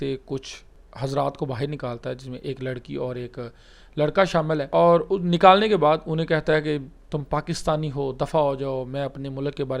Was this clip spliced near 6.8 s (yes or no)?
no